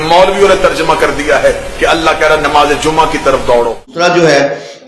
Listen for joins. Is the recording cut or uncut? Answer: cut